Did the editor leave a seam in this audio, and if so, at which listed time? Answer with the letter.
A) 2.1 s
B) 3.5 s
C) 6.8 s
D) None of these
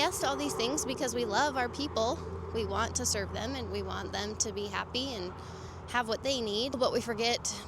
C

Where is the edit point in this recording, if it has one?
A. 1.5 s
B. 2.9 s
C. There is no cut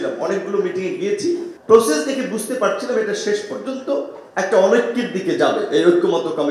A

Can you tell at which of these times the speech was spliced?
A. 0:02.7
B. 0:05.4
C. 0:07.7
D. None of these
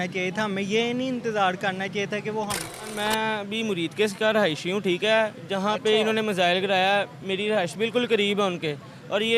A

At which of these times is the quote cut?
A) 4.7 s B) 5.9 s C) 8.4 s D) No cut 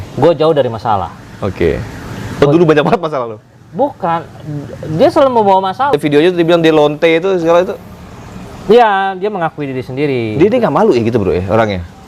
B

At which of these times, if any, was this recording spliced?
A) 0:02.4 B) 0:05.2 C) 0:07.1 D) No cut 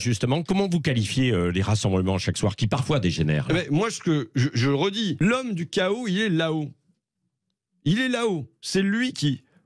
B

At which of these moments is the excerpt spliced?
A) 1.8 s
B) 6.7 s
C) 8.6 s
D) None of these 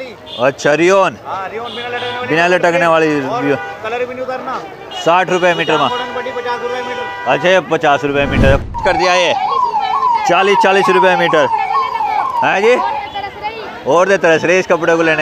C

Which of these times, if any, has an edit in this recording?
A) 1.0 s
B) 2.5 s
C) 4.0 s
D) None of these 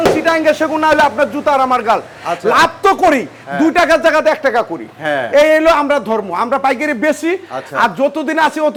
D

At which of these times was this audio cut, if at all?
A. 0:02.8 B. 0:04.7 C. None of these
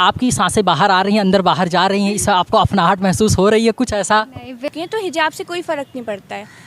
B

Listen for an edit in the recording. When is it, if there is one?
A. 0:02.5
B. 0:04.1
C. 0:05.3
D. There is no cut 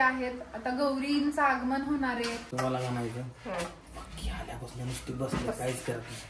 A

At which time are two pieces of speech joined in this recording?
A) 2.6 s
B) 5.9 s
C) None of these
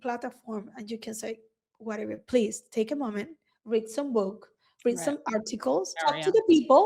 B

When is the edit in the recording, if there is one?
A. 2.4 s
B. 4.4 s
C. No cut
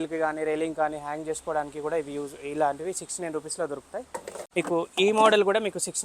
B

